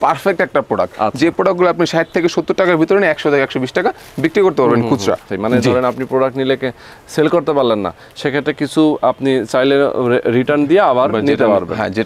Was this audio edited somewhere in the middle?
yes; 1 cut; at 5.3 s

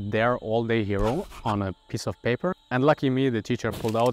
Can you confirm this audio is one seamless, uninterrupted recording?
no; 1 cut; at 2.6 s

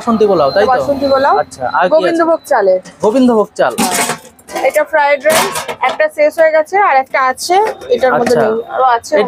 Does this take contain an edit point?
no; 0 cuts

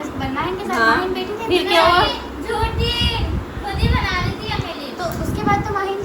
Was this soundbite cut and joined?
no; 0 cuts

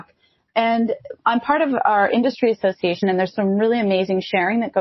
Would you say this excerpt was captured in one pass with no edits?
no; 1 cut; at 3.1 s

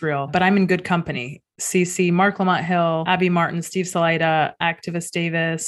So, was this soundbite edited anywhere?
no; 0 cuts

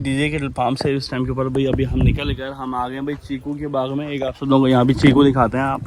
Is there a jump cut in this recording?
no; 0 cuts

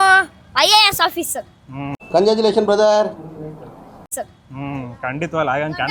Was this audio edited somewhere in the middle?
no; 0 cuts

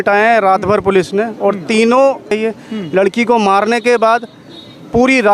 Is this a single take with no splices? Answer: no; 1 cut; at 2.3 s

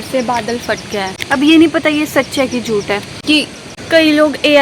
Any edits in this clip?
yes; 2 cuts; at 1.2 s, 3.6 s

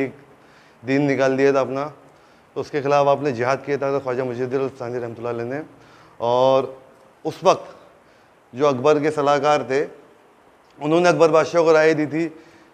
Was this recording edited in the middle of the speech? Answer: no; 0 cuts

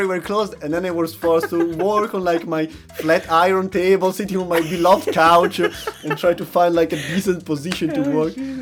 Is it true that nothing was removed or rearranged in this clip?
yes; 0 cuts

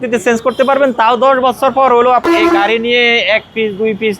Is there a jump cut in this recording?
yes; 1 cut; at 2.3 s

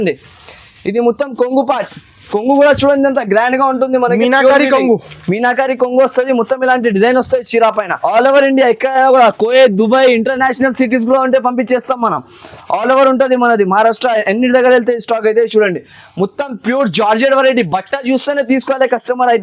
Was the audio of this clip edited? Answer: yes; 1 cut; at 8.0 s

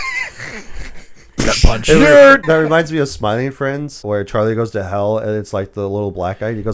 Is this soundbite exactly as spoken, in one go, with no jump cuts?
no; 2 cuts; at 2.4 s, 4.0 s

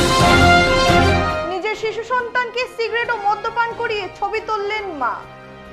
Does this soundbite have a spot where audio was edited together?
yes; 1 cut; at 1.1 s

